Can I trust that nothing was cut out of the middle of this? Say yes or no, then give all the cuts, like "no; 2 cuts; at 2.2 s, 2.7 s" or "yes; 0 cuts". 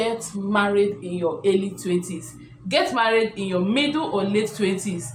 yes; 0 cuts